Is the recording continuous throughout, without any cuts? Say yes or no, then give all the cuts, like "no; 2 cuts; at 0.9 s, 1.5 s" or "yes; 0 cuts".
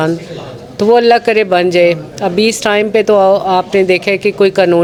yes; 0 cuts